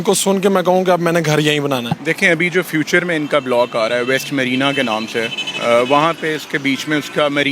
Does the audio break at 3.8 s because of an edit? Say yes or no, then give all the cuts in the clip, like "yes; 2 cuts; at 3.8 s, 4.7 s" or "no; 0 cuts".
no; 1 cut; at 1.9 s